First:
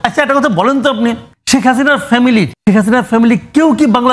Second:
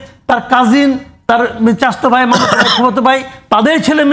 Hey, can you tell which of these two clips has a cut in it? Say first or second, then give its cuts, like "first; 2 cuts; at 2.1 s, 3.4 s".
first; 2 cuts; at 1.3 s, 2.5 s